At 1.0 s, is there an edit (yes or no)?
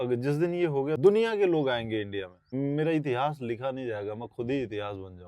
yes